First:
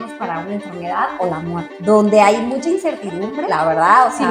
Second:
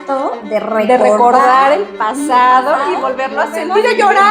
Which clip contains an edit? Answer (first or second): first